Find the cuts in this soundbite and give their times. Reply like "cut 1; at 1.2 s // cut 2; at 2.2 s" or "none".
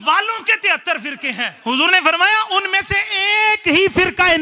cut 1; at 1.5 s